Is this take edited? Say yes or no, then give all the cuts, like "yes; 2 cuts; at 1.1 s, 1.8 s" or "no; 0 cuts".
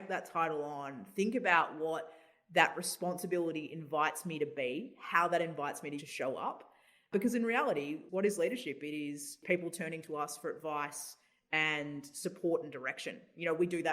yes; 4 cuts; at 6.0 s, 7.1 s, 8.0 s, 9.4 s